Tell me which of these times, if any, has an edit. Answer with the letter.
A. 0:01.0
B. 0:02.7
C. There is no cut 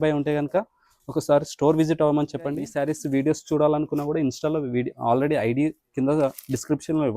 B